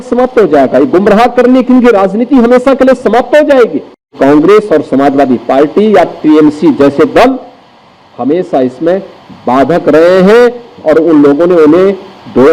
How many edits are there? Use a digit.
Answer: 1